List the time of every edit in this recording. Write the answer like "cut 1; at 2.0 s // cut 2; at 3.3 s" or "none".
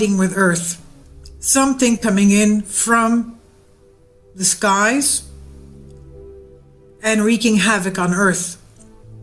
cut 1; at 1.8 s